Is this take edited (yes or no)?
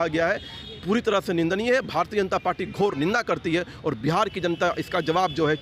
no